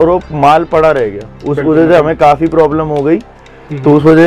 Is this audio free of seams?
yes; 0 cuts

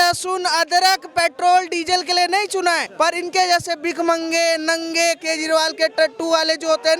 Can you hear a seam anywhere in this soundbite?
yes; 1 cut; at 2.9 s

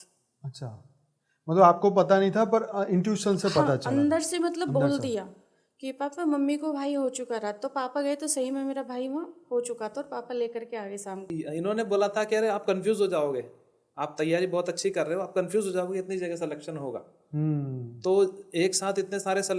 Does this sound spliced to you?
yes; 1 cut; at 11.3 s

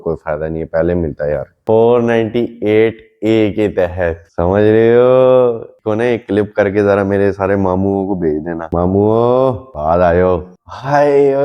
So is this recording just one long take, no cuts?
no; 2 cuts; at 1.5 s, 10.5 s

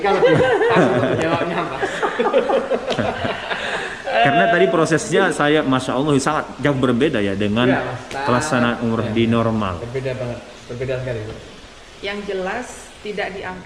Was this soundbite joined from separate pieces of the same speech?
no; 0 cuts

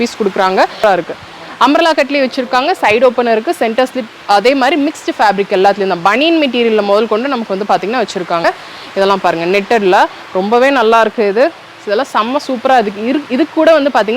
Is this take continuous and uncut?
no; 2 cuts; at 0.8 s, 8.4 s

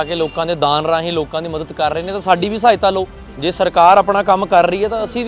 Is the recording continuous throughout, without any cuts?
no; 1 cut; at 3.2 s

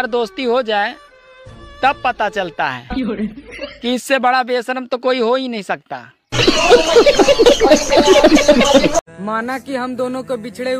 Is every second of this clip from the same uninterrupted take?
no; 1 cut; at 9.2 s

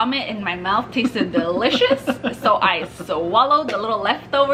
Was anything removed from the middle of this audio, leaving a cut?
no; 0 cuts

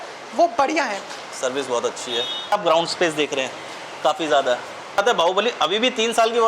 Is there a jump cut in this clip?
yes; 3 cuts; at 1.1 s, 2.5 s, 5.0 s

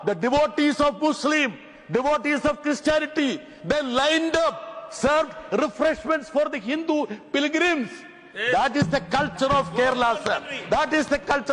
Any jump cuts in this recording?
no; 0 cuts

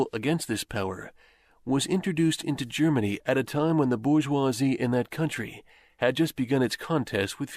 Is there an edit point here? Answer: no; 0 cuts

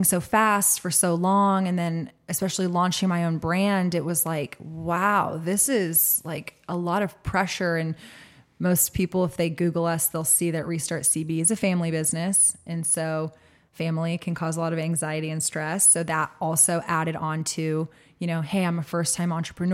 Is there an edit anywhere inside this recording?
no; 0 cuts

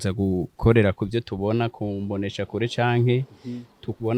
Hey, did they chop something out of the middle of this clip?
no; 0 cuts

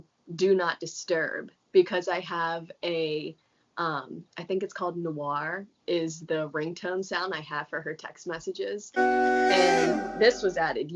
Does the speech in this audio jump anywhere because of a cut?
no; 0 cuts

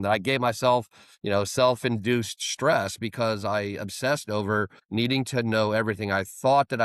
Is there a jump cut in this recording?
yes; 1 cut; at 4.8 s

